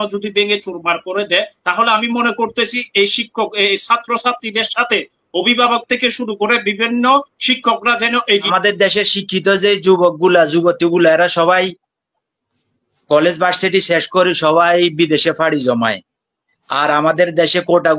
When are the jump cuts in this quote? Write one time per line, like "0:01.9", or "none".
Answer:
0:08.5